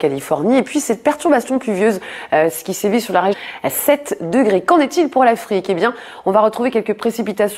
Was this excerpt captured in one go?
yes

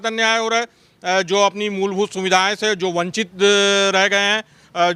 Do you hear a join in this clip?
no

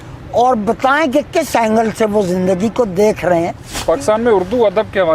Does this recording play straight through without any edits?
no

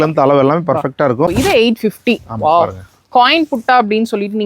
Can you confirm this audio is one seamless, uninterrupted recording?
no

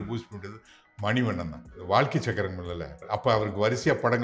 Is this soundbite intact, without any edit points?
no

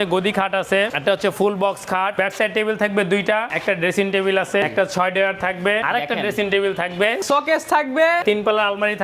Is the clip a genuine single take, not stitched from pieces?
no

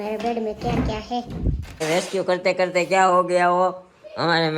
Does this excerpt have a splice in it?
yes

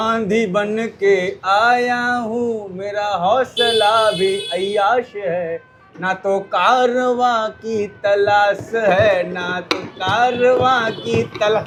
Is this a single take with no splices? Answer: yes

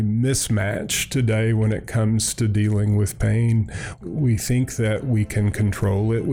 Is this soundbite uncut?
no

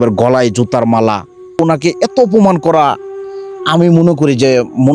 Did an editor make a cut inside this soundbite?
yes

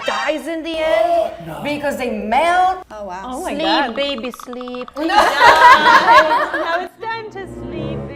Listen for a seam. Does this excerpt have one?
no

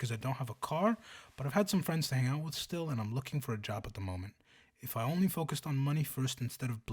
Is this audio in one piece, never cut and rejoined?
yes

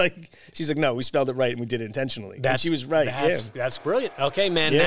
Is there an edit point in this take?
no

